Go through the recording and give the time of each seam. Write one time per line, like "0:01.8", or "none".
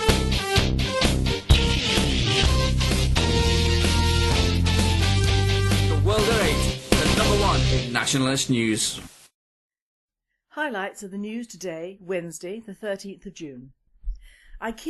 0:10.0